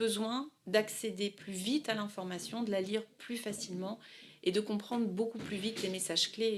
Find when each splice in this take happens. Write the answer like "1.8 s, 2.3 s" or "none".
none